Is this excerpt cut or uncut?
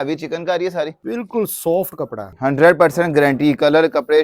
cut